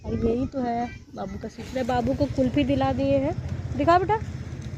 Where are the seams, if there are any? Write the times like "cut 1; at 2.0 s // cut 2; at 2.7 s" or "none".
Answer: cut 1; at 1.5 s

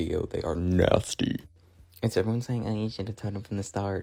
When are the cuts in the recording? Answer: none

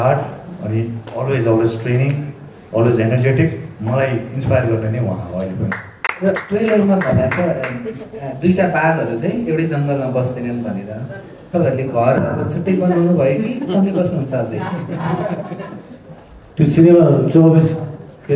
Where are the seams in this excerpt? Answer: none

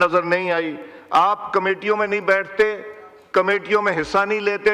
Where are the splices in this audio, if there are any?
none

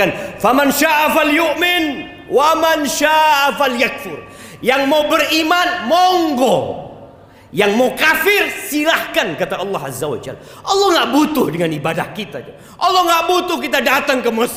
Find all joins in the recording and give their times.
none

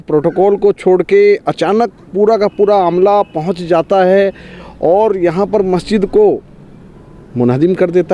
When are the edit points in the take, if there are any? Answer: none

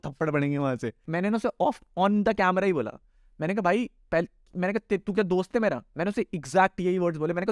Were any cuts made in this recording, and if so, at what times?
cut 1; at 1.0 s

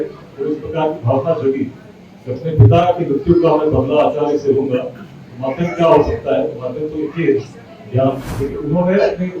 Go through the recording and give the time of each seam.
cut 1; at 8.3 s

